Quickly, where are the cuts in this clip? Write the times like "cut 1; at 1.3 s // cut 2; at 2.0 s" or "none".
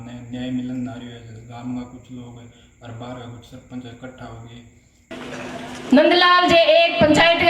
cut 1; at 5.1 s